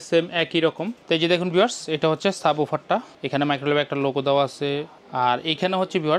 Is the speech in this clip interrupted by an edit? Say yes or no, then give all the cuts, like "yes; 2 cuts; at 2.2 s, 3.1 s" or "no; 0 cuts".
yes; 3 cuts; at 1.0 s, 3.2 s, 5.0 s